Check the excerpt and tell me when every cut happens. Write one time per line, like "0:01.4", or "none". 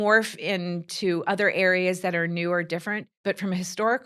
0:03.1